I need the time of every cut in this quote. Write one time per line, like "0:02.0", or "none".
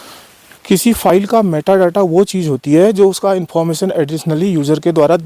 none